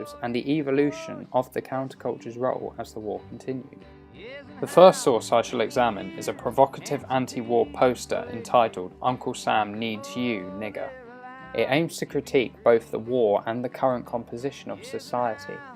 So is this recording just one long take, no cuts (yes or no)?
no